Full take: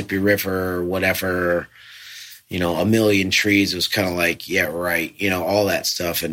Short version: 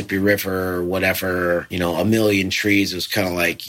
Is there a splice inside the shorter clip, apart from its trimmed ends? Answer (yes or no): yes